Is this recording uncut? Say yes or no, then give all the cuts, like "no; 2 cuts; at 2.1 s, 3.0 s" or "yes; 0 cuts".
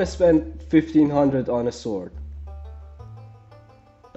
yes; 0 cuts